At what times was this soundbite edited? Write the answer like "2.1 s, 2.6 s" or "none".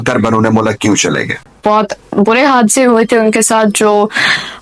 1.4 s